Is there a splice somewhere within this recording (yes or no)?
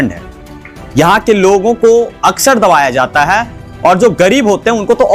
no